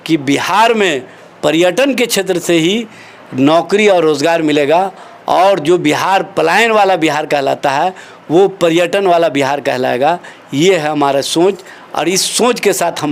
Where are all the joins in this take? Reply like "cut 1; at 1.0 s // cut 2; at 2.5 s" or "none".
none